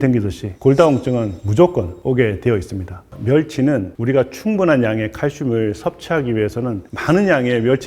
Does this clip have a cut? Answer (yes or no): yes